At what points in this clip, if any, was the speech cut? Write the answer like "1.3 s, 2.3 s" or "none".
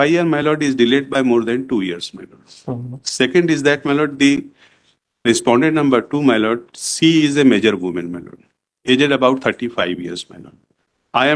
none